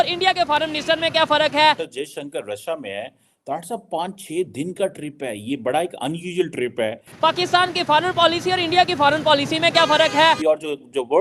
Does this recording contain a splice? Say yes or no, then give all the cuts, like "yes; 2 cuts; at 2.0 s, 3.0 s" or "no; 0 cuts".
yes; 3 cuts; at 1.9 s, 7.1 s, 10.4 s